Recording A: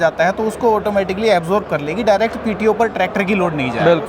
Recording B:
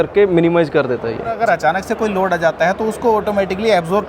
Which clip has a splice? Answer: B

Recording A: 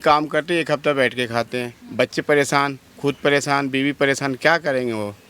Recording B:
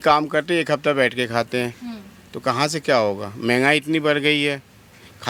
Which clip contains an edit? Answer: A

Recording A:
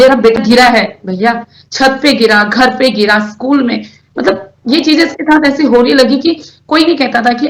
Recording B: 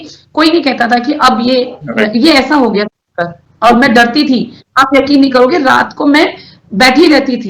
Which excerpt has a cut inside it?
B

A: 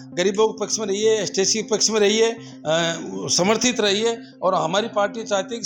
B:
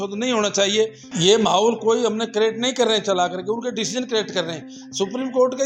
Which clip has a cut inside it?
B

